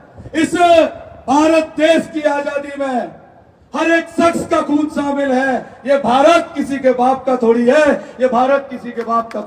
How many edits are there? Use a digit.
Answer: 0